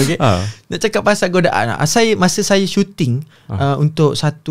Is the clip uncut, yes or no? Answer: yes